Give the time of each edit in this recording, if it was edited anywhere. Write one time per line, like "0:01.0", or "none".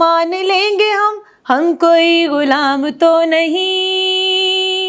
none